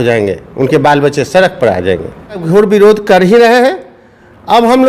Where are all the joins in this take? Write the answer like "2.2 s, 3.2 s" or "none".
2.4 s